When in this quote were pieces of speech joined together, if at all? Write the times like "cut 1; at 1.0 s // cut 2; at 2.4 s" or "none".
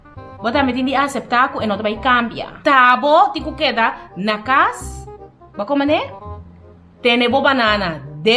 cut 1; at 2.6 s